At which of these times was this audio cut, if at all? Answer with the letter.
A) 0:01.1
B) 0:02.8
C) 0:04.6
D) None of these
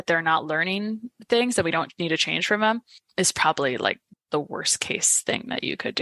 D